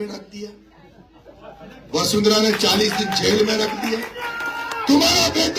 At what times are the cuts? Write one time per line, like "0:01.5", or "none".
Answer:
none